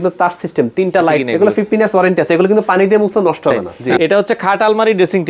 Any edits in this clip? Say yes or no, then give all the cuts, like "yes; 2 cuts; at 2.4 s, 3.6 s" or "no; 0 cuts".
yes; 2 cuts; at 1.3 s, 3.8 s